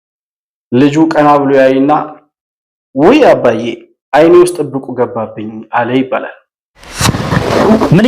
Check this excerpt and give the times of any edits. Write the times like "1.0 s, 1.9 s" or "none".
6.9 s